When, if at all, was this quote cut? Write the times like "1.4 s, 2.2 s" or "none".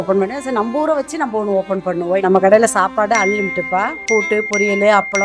2.2 s